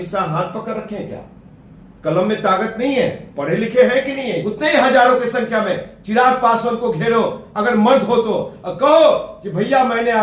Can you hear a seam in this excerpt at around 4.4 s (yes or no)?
yes